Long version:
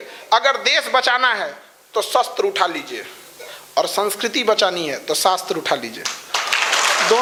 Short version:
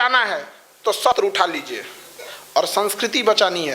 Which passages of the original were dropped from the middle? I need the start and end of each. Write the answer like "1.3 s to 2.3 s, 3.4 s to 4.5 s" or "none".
2.2 s to 2.4 s